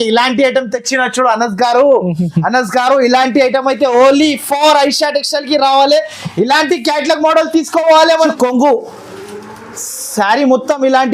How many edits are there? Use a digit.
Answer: 1